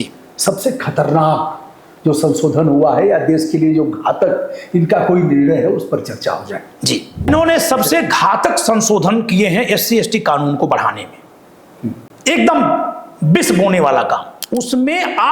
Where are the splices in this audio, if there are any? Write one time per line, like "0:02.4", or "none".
0:07.3
0:14.4